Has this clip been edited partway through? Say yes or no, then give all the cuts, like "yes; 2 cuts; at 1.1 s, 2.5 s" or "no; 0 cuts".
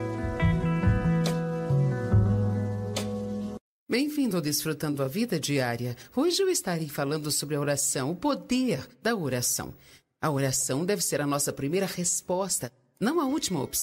yes; 1 cut; at 3.7 s